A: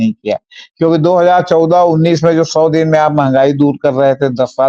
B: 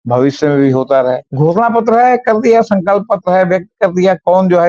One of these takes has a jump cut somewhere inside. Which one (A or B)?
B